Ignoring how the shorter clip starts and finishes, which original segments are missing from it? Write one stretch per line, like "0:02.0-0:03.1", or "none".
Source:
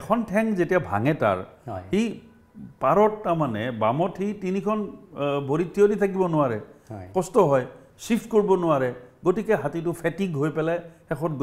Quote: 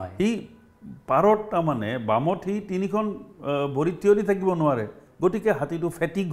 0:06.8-0:09.1